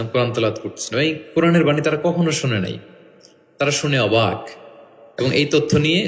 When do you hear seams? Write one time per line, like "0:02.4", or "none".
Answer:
none